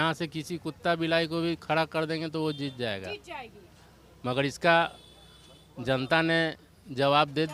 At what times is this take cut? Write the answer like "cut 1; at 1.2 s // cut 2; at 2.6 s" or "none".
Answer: none